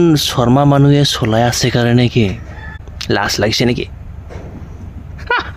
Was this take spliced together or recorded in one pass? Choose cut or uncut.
cut